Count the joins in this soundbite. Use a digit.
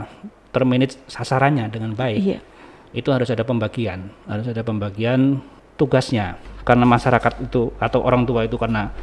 2